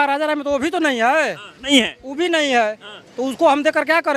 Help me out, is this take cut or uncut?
uncut